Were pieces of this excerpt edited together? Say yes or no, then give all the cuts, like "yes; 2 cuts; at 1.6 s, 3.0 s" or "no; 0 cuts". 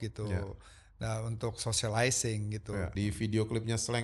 yes; 1 cut; at 2.9 s